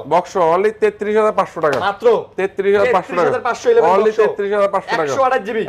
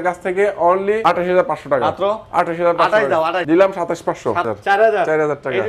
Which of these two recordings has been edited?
second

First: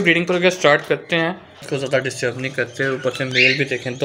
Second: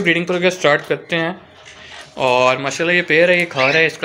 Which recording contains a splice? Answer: first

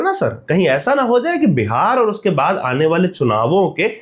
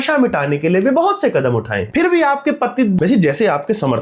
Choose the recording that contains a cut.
second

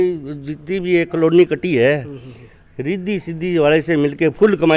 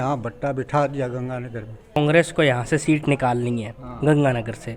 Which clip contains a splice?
second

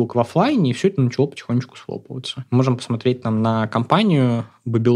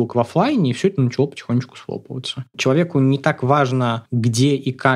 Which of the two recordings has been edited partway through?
second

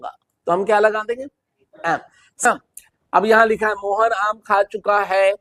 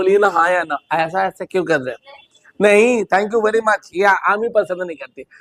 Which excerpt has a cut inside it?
first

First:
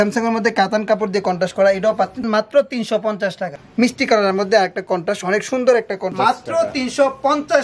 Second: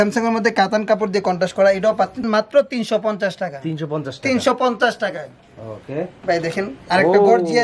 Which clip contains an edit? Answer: first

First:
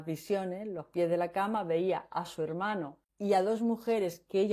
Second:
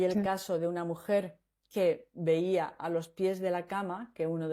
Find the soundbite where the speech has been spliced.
first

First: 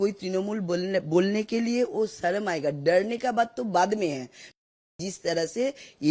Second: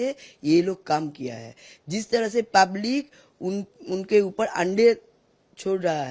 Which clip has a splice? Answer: first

